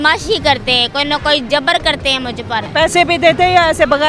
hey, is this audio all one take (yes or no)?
no